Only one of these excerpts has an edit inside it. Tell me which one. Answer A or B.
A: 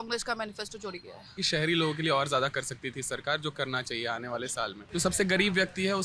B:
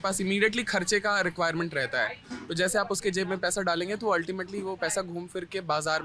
A